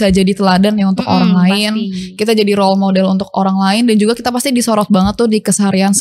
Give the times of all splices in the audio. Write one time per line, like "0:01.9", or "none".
none

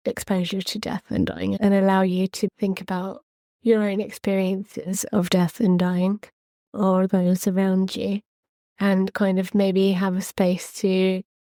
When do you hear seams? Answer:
none

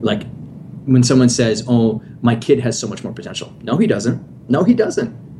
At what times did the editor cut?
none

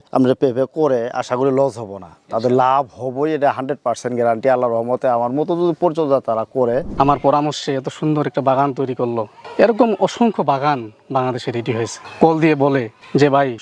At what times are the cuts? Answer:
0:06.9

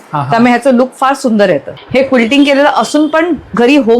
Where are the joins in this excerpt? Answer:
0:01.8

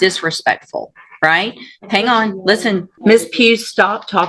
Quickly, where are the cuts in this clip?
0:02.9

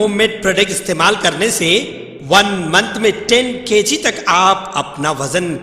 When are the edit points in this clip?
none

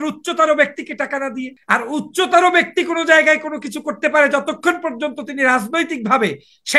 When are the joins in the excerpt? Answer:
0:01.5

